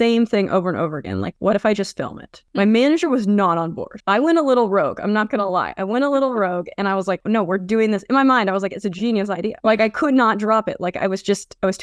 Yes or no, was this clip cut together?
no